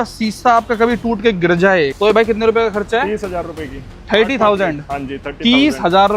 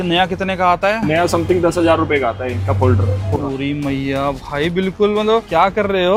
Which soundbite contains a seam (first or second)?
first